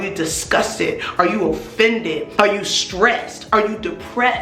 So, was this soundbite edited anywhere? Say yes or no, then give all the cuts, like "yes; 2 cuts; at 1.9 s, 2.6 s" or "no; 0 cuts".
yes; 1 cut; at 2.3 s